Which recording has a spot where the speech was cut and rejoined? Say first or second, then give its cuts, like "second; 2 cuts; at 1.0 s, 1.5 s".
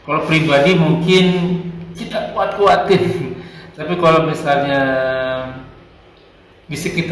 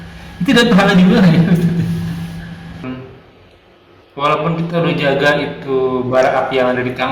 second; 1 cut; at 2.8 s